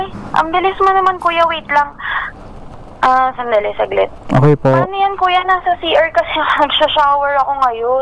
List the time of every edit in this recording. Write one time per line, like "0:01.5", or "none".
none